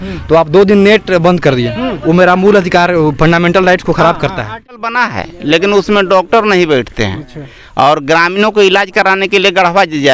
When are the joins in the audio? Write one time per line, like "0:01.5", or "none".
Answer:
0:04.9